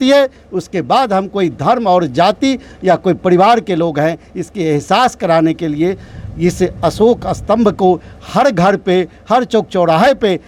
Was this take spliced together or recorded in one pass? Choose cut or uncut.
uncut